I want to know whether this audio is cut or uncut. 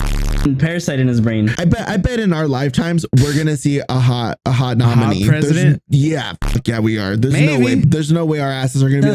cut